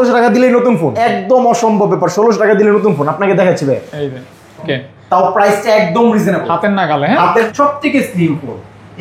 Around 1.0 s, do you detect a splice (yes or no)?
yes